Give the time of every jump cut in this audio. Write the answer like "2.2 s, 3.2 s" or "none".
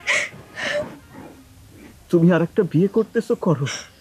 none